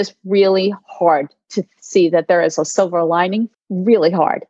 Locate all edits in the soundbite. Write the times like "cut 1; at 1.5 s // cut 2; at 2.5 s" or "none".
cut 1; at 3.5 s